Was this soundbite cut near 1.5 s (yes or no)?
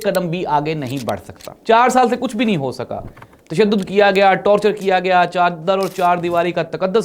yes